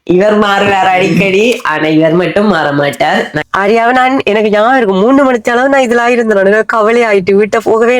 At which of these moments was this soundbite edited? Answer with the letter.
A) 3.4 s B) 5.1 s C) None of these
A